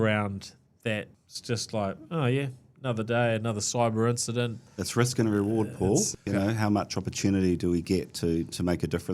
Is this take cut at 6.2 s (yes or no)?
yes